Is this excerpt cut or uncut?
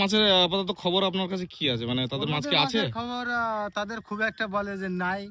uncut